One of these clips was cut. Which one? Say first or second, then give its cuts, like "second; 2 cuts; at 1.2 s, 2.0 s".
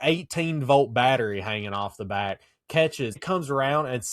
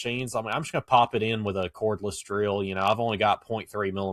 first; 1 cut; at 3.2 s